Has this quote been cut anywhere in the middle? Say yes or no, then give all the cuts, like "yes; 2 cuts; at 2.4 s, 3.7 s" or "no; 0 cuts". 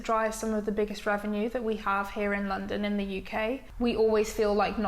yes; 1 cut; at 3.7 s